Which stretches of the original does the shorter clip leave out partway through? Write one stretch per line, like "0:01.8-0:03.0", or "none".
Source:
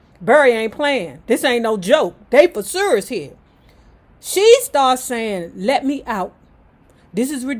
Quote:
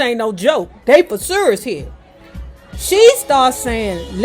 none